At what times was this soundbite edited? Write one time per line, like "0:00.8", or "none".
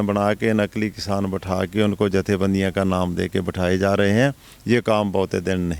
none

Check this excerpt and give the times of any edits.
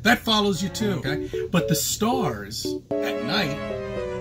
0:01.1

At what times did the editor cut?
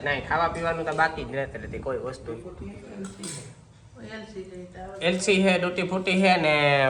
none

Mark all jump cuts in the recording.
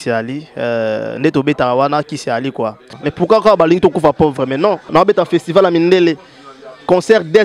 0:03.0
0:04.9

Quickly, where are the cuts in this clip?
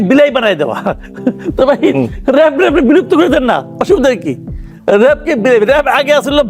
none

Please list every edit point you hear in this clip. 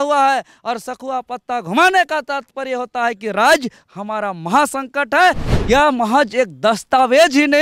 0:05.5

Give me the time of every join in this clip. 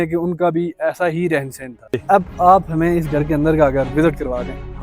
0:02.0

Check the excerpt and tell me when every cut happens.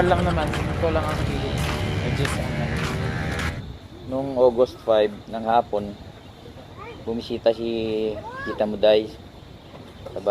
0:03.5

